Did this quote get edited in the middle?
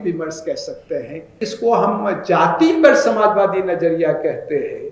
yes; 1 cut; at 1.4 s

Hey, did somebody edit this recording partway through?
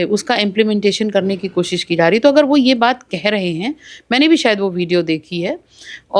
no; 0 cuts

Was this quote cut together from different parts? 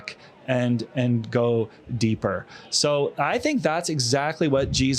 no; 0 cuts

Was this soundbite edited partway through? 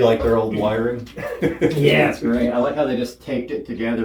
no; 0 cuts

